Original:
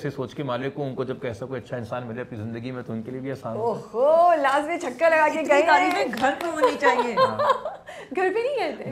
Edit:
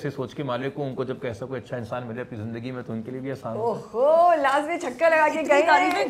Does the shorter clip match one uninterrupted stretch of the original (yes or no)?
yes